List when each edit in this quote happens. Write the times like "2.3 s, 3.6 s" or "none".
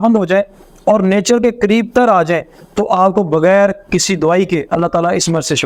none

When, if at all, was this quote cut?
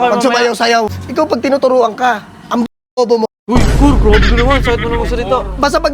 1.0 s

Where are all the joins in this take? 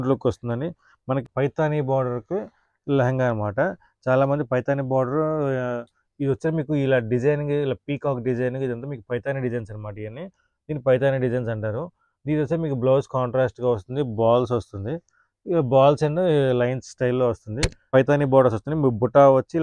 1.2 s, 17.9 s

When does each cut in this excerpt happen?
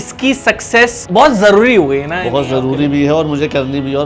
none

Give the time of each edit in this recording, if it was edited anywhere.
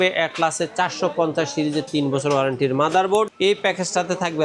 3.3 s

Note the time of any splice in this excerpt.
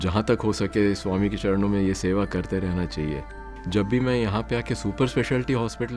3.2 s

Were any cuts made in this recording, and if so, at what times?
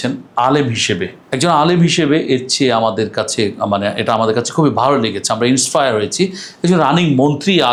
none

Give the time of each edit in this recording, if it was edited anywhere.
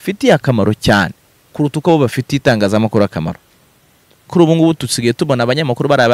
4.2 s

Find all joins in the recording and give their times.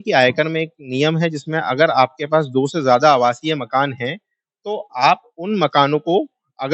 none

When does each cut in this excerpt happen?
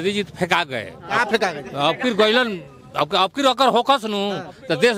none

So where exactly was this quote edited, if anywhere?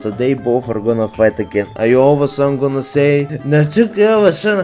1.7 s, 3.3 s

